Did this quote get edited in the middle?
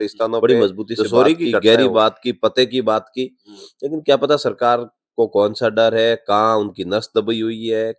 yes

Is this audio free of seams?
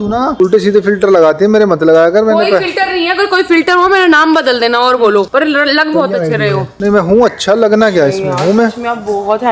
yes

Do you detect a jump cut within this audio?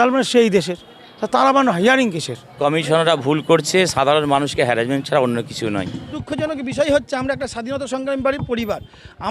yes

